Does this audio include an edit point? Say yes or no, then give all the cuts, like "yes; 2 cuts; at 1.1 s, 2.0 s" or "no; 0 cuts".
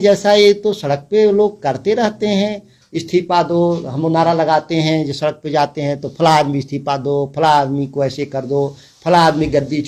no; 0 cuts